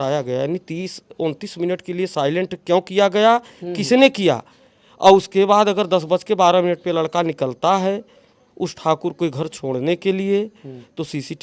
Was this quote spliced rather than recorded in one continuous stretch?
no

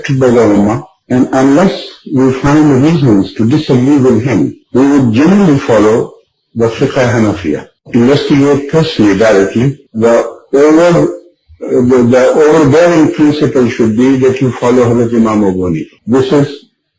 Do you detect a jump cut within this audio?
no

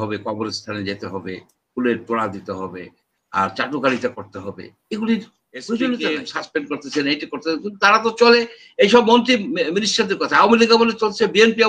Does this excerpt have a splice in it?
yes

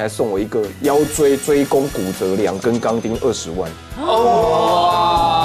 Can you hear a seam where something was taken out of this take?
no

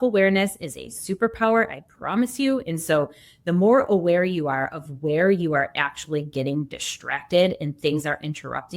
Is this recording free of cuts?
yes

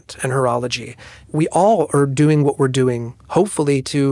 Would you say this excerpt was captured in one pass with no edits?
no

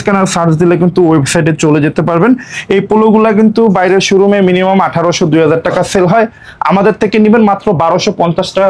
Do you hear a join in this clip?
no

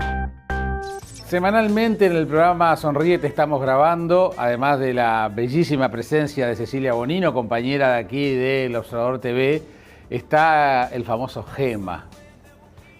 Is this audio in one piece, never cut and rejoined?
no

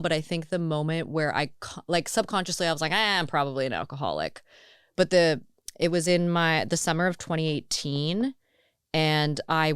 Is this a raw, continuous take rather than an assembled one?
yes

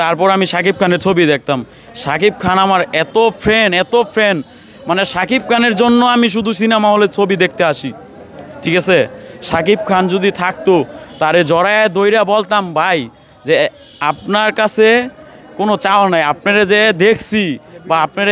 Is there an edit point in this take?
no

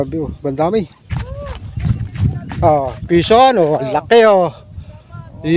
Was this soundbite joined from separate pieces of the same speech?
yes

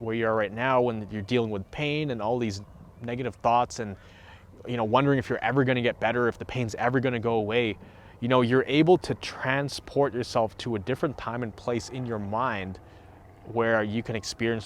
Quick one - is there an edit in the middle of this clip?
no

